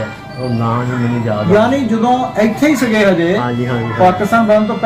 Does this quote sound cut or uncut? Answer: uncut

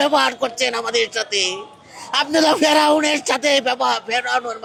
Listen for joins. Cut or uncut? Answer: uncut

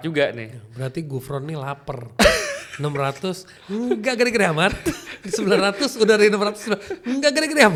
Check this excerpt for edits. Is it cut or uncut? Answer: uncut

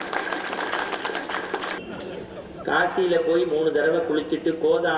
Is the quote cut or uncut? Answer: cut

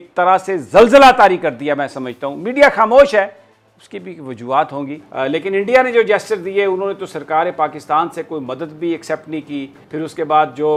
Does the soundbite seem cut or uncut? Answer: uncut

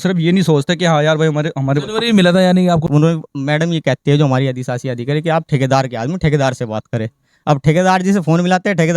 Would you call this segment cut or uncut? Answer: cut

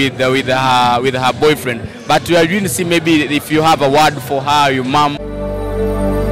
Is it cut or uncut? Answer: cut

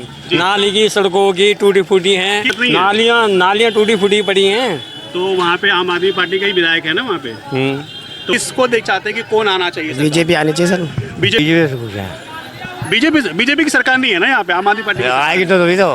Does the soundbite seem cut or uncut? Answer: cut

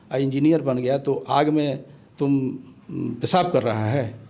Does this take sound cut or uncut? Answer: uncut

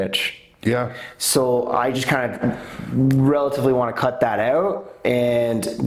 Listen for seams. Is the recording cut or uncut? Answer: uncut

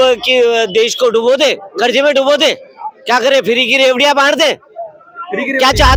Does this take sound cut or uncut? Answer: uncut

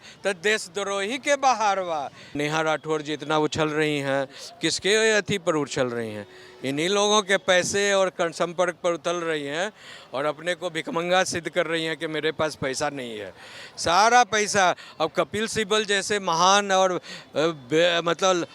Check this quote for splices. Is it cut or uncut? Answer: cut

